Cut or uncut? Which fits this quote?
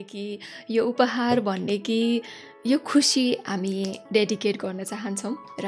uncut